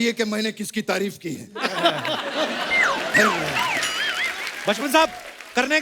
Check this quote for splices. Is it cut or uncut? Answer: uncut